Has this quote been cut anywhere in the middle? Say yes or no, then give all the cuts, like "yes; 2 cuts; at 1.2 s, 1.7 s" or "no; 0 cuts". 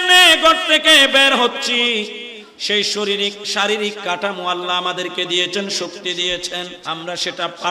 yes; 1 cut; at 6.8 s